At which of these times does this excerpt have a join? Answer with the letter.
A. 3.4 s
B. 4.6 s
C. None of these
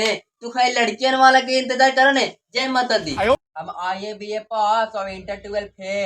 A